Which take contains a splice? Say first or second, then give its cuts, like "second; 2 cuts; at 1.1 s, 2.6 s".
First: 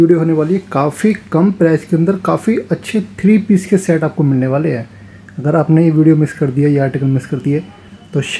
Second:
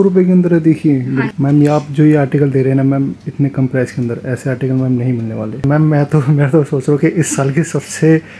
second; 2 cuts; at 1.3 s, 5.6 s